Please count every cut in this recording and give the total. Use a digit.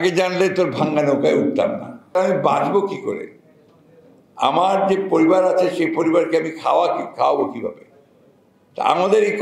1